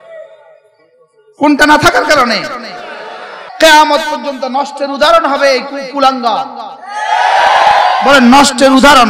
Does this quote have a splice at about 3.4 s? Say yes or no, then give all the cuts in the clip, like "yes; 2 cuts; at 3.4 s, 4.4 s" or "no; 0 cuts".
yes; 1 cut; at 3.4 s